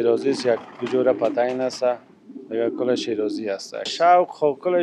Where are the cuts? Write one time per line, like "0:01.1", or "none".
0:03.8